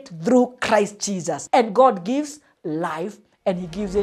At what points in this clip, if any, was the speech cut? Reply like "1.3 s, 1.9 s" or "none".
1.3 s